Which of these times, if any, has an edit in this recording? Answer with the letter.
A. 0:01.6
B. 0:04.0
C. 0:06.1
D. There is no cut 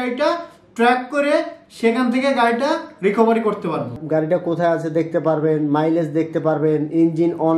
B